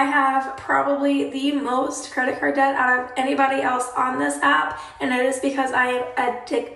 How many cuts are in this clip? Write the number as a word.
zero